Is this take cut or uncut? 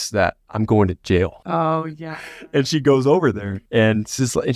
cut